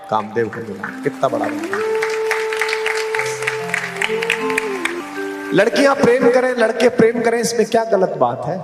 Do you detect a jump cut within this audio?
yes; 1 cut; at 5.1 s

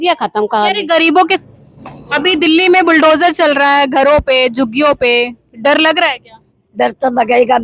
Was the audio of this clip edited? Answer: no; 0 cuts

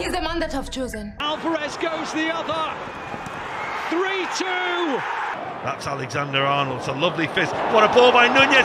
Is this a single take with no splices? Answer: no; 1 cut; at 1.2 s

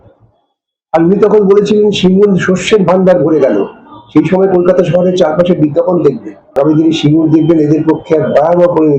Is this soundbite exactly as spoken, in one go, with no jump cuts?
no; 1 cut; at 6.6 s

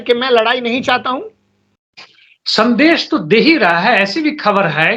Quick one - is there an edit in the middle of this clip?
no; 0 cuts

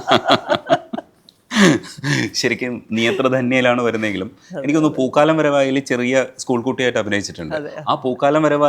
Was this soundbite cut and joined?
no; 0 cuts

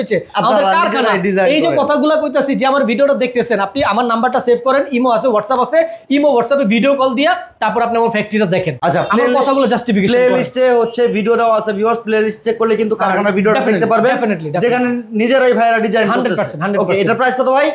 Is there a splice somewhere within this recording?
no; 0 cuts

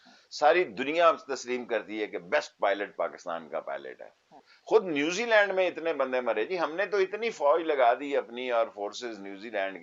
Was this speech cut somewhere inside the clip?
yes; 1 cut; at 4.5 s

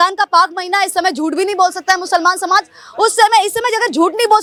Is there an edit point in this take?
no; 0 cuts

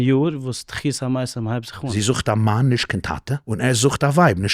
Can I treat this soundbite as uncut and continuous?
no; 2 cuts; at 1.9 s, 3.4 s

